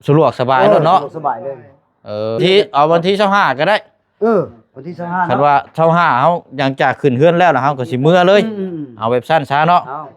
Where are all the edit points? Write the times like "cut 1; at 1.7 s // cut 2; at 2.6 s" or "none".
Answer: cut 1; at 2.4 s